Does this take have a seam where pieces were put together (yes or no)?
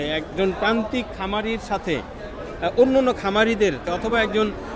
yes